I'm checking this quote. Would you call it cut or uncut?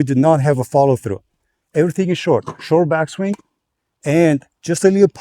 uncut